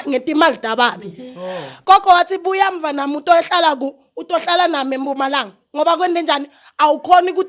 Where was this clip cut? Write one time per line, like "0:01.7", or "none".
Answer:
0:01.7